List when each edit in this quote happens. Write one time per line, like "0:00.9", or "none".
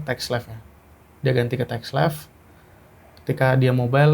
none